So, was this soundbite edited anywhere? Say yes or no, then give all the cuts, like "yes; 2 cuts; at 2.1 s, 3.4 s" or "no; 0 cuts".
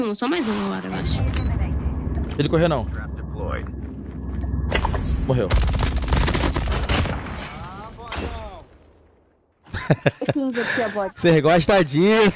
no; 0 cuts